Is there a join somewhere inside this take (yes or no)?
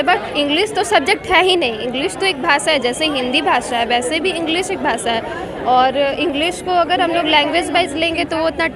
no